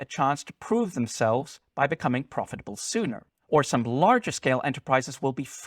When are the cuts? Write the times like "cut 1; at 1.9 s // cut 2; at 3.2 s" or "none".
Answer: cut 1; at 3.3 s